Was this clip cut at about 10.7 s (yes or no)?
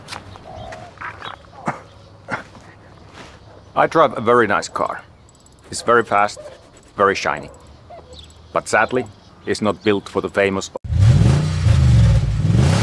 yes